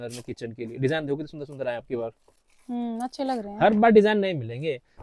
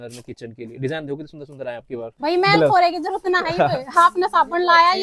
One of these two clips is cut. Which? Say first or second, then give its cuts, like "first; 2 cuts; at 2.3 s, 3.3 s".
second; 1 cut; at 2.1 s